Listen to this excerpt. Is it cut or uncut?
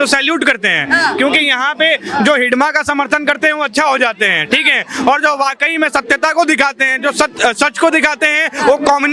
uncut